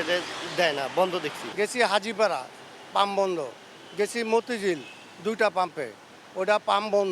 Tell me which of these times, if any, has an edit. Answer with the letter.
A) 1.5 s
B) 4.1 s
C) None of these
A